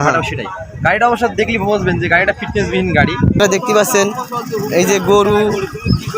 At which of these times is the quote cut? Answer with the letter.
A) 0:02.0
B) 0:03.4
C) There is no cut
B